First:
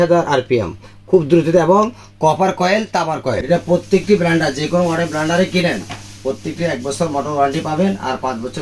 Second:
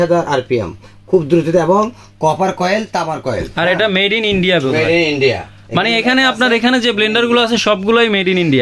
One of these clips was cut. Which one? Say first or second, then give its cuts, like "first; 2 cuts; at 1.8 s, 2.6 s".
first; 1 cut; at 3.4 s